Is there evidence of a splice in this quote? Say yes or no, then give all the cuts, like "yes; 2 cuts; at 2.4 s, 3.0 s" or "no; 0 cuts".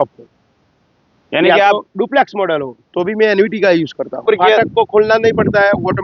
yes; 1 cut; at 4.2 s